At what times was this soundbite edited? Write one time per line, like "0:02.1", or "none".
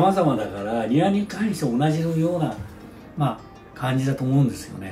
none